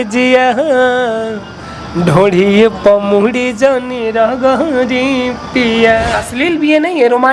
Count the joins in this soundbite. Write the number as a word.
one